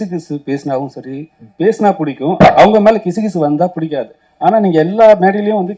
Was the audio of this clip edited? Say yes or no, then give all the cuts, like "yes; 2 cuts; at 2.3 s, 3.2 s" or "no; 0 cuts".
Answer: no; 0 cuts